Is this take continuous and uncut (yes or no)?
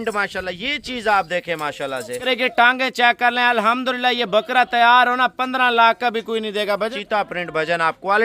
no